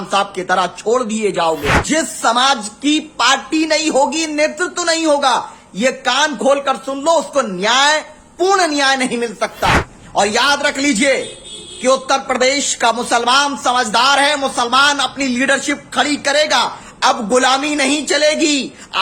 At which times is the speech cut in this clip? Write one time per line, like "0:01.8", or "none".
0:01.8
0:09.9